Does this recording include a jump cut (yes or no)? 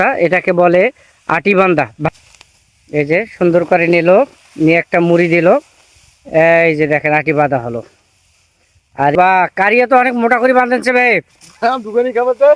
no